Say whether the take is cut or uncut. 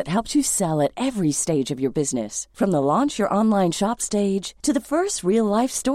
uncut